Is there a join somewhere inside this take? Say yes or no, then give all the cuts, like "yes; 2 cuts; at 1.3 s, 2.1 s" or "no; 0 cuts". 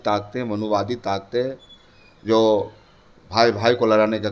no; 0 cuts